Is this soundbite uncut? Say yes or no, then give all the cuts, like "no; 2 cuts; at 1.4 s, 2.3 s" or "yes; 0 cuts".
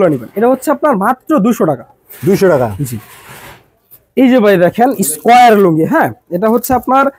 yes; 0 cuts